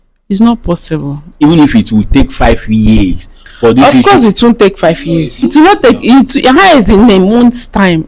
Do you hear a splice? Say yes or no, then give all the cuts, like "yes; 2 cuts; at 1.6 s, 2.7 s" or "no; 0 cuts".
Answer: yes; 2 cuts; at 1.3 s, 5.4 s